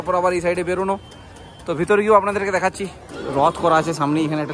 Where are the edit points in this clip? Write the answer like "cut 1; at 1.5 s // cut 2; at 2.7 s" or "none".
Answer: cut 1; at 3.0 s